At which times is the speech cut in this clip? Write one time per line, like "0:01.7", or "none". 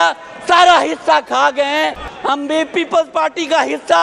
0:02.4